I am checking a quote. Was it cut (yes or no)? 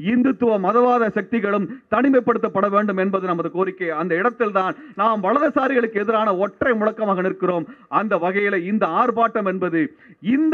no